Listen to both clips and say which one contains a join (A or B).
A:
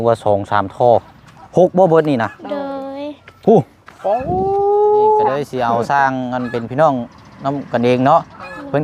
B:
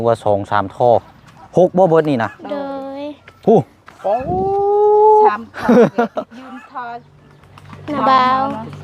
A